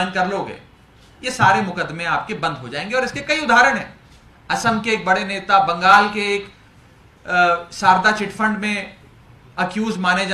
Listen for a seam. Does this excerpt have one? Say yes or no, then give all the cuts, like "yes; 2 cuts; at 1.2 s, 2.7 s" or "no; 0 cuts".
no; 0 cuts